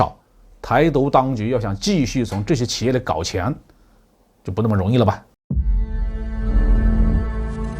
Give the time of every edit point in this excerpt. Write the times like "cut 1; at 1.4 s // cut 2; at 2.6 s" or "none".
cut 1; at 5.3 s